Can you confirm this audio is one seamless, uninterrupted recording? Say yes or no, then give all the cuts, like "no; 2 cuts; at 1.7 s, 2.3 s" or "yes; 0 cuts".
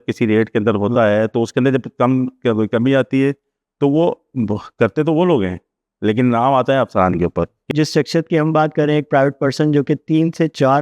no; 1 cut; at 7.7 s